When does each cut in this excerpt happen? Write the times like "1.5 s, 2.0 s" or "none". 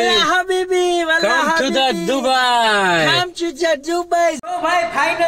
4.3 s